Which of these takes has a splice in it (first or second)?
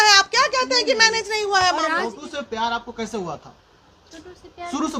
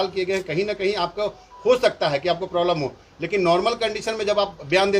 first